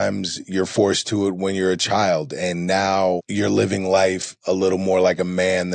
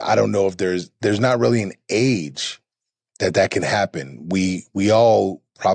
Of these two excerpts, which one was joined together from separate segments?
first; 1 cut; at 3.3 s

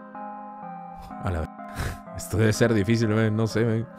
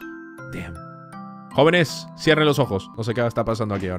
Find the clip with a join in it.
second; 1 cut; at 2.9 s

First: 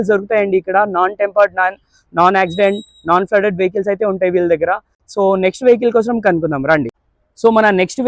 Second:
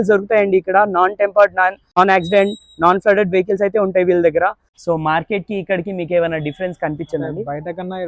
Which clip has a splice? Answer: second; 2 cuts; at 2.0 s, 4.7 s

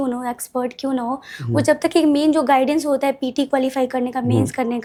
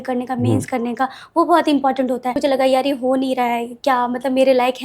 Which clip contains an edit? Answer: second; 1 cut; at 2.4 s

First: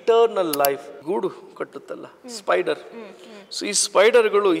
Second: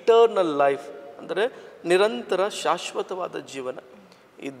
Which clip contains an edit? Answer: first; 1 cut; at 0.9 s

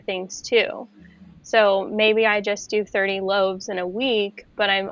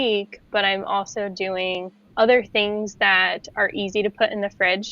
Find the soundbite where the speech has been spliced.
second; 1 cut; at 2.0 s

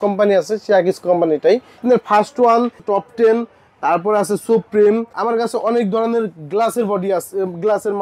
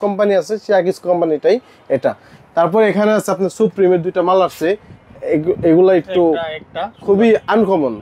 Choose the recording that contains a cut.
first; 3 cuts; at 1.8 s, 2.8 s, 5.1 s

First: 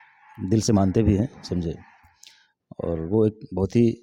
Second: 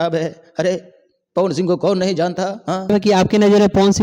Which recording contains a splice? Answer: second; 1 cut; at 2.9 s

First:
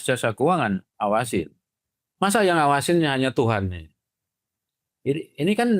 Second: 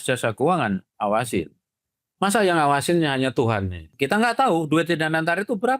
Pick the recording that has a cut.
second; 1 cut; at 3.9 s

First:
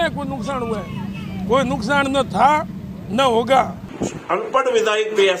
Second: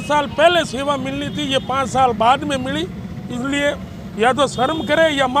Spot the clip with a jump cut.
first; 1 cut; at 3.8 s

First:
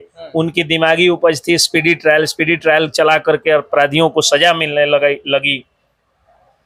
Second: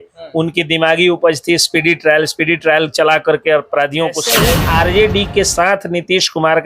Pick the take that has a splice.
second; 1 cut; at 4.3 s

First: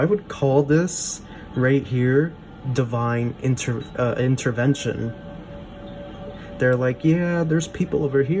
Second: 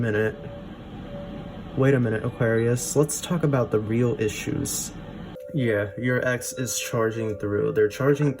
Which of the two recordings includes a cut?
second; 1 cut; at 5.3 s

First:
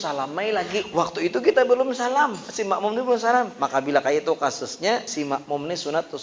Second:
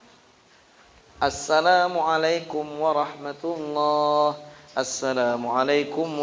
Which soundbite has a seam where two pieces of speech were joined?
first; 4 cuts; at 0.9 s, 2.5 s, 3.6 s, 5.1 s

